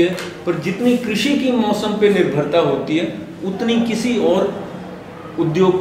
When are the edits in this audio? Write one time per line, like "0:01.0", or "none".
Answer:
none